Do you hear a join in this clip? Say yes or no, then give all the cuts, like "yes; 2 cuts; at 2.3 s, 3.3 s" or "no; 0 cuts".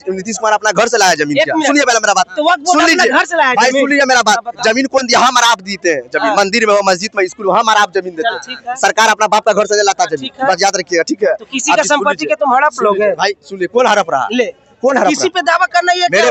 no; 0 cuts